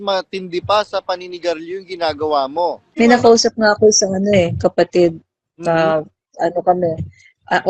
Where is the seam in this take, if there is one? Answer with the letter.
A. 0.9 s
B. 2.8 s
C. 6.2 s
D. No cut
B